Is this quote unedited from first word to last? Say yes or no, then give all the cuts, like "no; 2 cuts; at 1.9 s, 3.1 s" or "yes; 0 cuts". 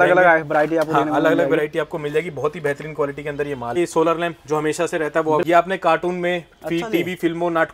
no; 2 cuts; at 3.8 s, 5.4 s